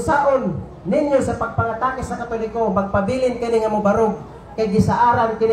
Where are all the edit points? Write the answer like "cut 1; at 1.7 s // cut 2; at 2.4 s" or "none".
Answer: none